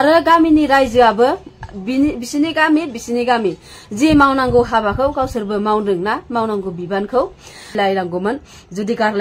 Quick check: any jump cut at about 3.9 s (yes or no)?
no